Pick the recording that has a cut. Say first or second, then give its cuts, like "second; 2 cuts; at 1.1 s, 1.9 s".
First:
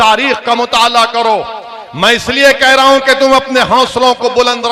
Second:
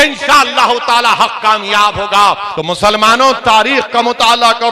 second; 1 cut; at 2.5 s